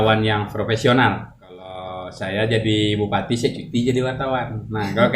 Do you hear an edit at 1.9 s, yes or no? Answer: yes